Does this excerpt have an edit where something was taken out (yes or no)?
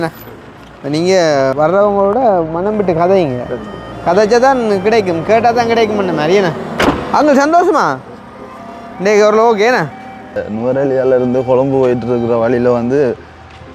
yes